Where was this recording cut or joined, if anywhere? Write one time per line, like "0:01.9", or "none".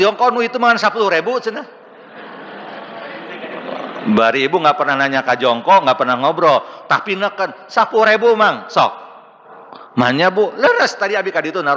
none